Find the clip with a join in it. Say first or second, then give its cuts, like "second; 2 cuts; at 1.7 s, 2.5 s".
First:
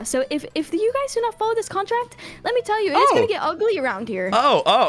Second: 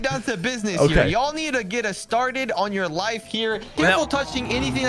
second; 1 cut; at 3.7 s